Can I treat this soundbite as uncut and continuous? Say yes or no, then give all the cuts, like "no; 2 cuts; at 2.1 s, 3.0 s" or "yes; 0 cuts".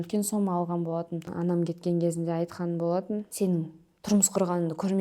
no; 2 cuts; at 1.3 s, 3.3 s